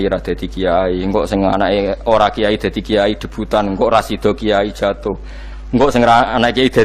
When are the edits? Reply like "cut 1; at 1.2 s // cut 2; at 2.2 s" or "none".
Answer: none